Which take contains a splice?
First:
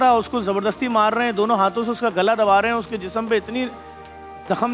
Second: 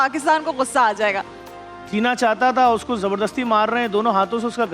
second; 1 cut; at 1.2 s

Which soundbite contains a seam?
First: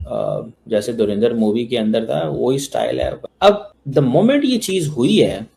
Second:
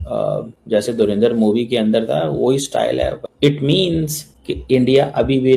second; 1 cut; at 3.2 s

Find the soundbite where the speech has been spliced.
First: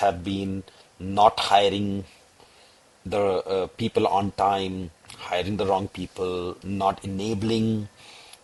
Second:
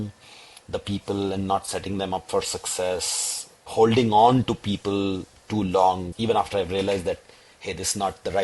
second; 1 cut; at 6.1 s

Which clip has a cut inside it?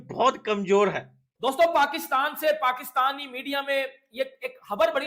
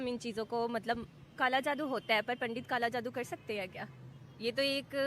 first; 1 cut; at 1.3 s

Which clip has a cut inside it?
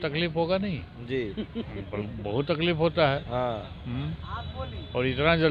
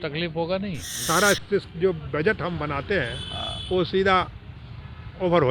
second; 1 cut; at 0.9 s

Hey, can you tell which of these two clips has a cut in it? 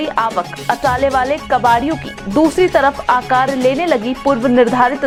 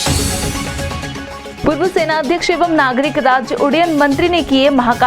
second; 1 cut; at 1.1 s

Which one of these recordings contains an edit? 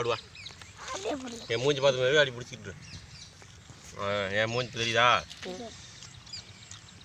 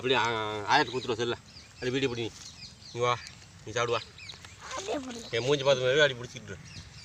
first; 1 cut; at 5.5 s

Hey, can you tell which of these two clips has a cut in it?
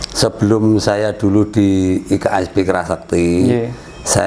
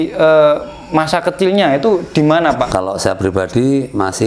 second; 1 cut; at 2.7 s

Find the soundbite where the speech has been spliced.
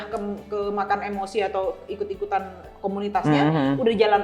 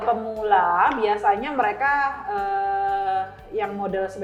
first; 1 cut; at 2.7 s

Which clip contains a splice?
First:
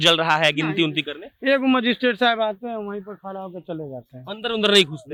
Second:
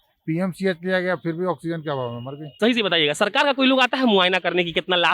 second; 1 cut; at 2.6 s

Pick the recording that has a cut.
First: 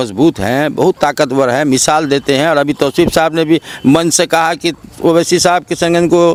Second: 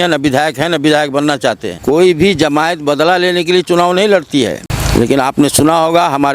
second; 2 cuts; at 1.7 s, 4.7 s

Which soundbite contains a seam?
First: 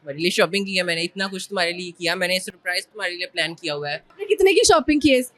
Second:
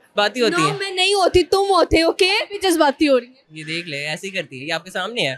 first; 1 cut; at 4.1 s

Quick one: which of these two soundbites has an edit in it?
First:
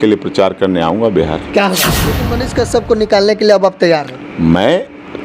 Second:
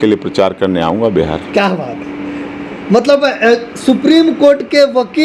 first; 1 cut; at 2.4 s

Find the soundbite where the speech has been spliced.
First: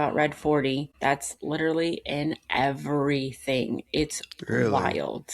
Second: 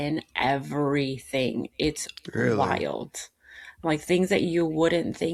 first; 1 cut; at 0.9 s

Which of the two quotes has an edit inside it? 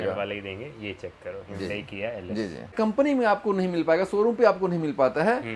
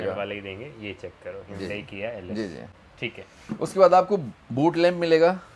first; 1 cut; at 2.7 s

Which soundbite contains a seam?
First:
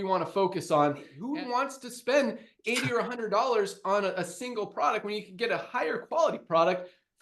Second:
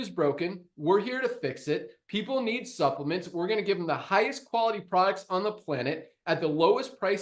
first; 1 cut; at 1.1 s

